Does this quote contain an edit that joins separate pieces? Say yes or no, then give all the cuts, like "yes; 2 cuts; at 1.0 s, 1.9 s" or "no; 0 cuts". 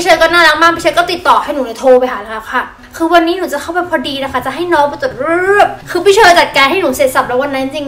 no; 0 cuts